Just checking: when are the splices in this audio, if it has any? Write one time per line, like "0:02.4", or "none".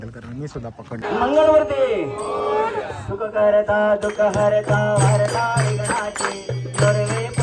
0:01.0